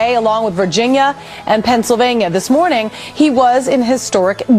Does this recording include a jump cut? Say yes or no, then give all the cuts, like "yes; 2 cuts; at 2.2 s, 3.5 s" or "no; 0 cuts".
yes; 1 cut; at 1.2 s